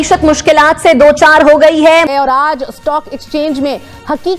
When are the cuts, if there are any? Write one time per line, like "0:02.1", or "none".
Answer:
0:02.1